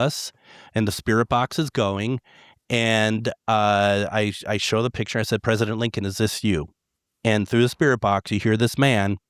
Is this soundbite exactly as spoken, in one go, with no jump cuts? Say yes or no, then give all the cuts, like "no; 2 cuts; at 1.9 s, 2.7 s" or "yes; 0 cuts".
yes; 0 cuts